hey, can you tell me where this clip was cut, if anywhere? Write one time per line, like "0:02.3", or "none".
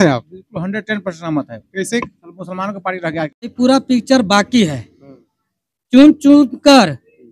0:03.5